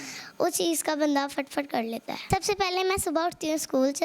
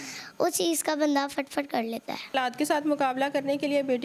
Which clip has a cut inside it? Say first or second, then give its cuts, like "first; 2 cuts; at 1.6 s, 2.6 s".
second; 1 cut; at 2.3 s